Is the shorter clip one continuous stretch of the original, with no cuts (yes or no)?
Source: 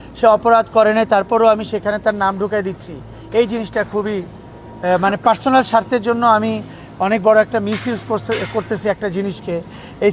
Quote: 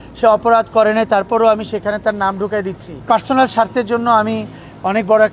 no